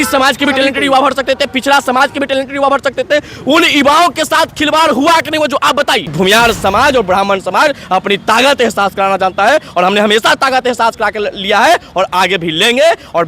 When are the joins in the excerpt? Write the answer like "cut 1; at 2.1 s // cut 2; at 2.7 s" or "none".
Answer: cut 1; at 6.1 s